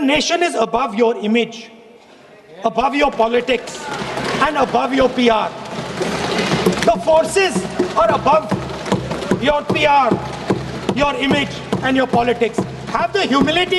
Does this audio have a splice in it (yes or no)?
no